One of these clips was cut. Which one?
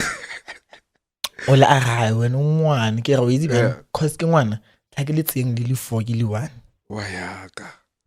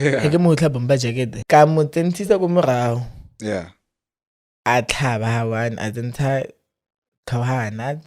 second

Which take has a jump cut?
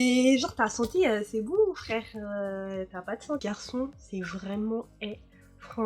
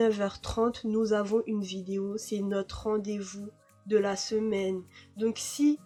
first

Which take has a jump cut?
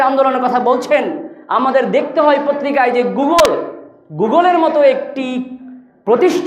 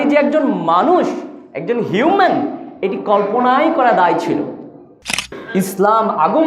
second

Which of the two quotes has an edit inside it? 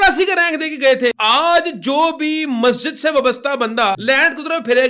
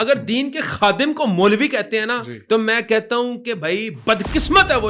first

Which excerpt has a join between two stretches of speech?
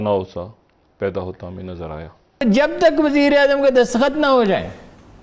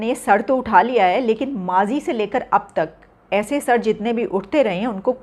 first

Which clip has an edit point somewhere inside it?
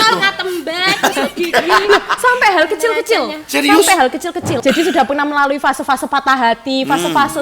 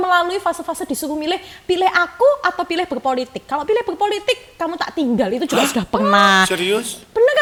first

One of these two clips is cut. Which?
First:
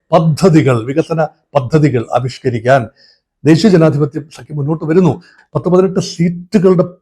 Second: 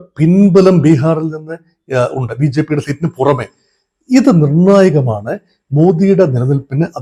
first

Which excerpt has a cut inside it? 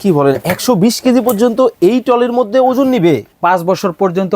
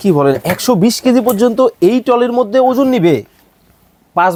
first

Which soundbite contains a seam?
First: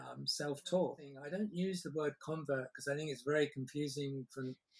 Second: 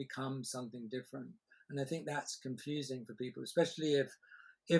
first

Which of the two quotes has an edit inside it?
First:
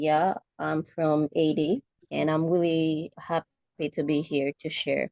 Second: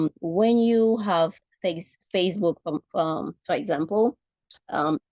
first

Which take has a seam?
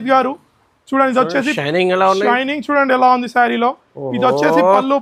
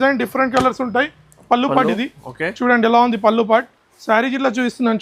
second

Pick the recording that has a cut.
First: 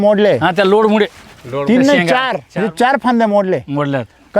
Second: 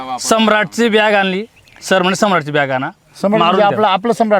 first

